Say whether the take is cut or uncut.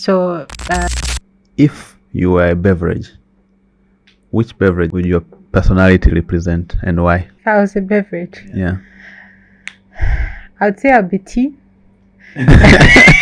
cut